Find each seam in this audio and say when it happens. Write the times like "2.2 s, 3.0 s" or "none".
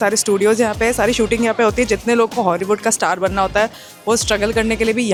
none